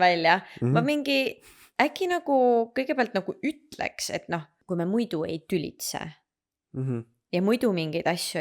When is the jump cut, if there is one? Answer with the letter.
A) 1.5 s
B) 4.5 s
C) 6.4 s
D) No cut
B